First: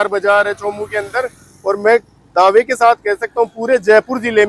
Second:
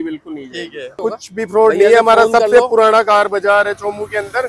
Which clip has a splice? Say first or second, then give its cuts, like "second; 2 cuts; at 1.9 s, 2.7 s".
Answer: second; 1 cut; at 1.0 s